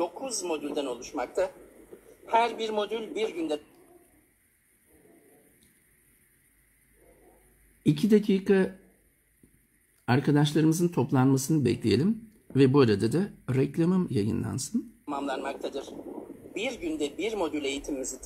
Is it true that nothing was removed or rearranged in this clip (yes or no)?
yes